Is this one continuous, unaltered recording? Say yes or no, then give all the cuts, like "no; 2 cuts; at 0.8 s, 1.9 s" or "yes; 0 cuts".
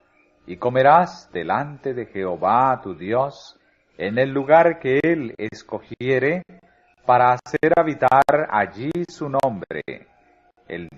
no; 1 cut; at 8.8 s